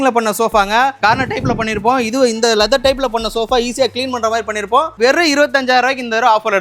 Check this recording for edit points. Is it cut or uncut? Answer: cut